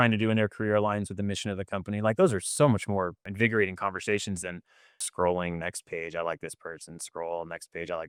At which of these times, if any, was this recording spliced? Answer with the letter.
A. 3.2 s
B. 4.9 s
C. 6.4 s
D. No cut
D